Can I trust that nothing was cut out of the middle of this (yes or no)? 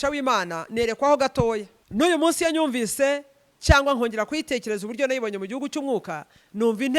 no